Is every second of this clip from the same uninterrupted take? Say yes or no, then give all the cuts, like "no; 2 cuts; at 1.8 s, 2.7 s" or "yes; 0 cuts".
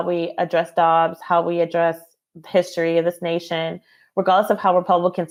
yes; 0 cuts